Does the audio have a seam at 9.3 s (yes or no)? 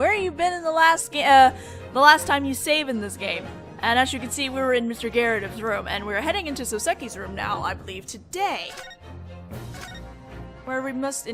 no